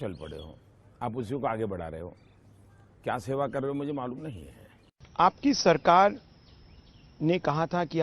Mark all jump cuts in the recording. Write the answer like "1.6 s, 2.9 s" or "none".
4.8 s